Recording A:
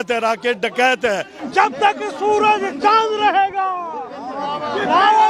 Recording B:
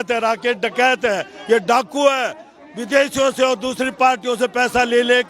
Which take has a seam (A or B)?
A